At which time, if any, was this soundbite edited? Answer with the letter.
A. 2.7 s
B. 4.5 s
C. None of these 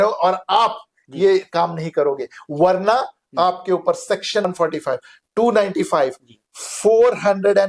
B